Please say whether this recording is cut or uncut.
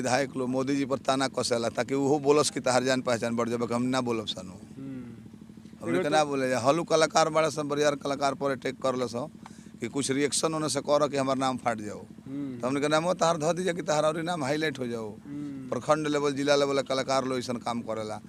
uncut